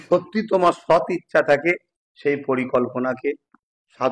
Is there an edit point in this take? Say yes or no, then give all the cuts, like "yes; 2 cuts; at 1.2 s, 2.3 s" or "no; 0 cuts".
no; 0 cuts